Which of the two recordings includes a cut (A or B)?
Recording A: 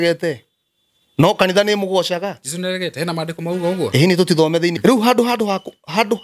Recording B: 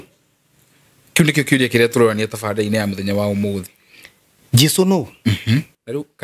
A